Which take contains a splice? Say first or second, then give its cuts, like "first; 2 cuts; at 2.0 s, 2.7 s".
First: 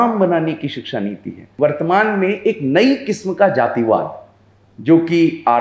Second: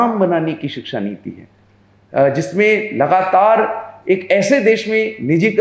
first; 1 cut; at 1.5 s